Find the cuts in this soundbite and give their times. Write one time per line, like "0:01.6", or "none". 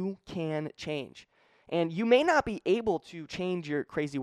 none